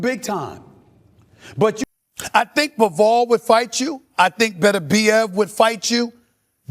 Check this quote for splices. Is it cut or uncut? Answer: cut